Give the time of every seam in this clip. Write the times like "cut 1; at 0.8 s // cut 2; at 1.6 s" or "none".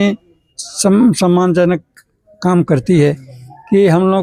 none